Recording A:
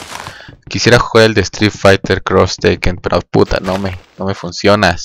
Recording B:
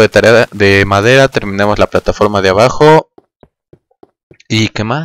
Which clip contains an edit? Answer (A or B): A